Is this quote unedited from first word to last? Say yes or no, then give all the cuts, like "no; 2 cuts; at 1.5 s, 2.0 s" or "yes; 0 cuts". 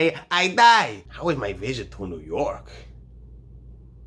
no; 1 cut; at 1.0 s